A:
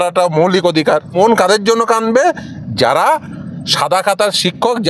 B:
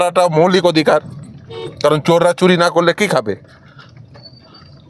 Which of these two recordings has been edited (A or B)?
A